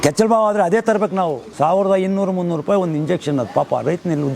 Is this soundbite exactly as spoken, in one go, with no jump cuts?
no; 1 cut; at 1.4 s

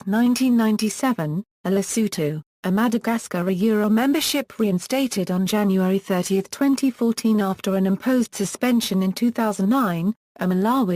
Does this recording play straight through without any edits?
no; 1 cut; at 4.0 s

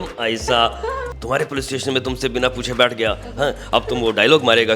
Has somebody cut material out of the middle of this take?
yes; 1 cut; at 1.1 s

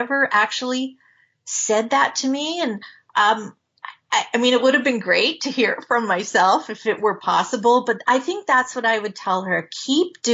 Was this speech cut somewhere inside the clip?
no; 0 cuts

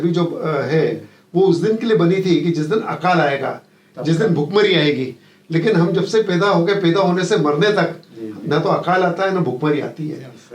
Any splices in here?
no; 0 cuts

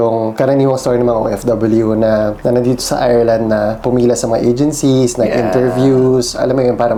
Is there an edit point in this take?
no; 0 cuts

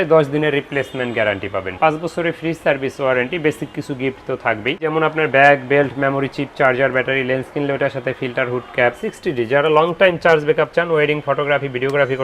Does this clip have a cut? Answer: yes; 3 cuts; at 1.7 s, 4.8 s, 9.1 s

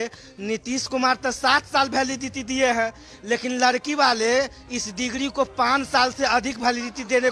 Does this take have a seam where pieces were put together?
no; 0 cuts

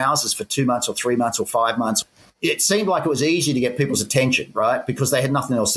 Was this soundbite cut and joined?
no; 0 cuts

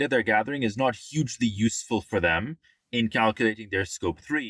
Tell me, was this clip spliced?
no; 0 cuts

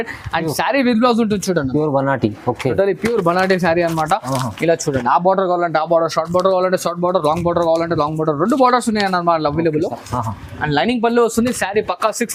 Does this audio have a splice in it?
no; 0 cuts

